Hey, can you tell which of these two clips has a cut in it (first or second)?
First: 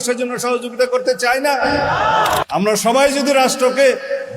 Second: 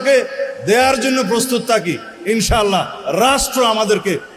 first